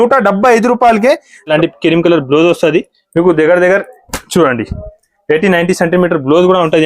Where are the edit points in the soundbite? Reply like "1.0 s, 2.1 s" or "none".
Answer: 1.5 s